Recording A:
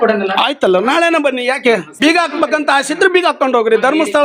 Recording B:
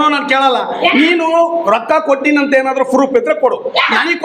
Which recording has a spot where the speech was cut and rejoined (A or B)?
A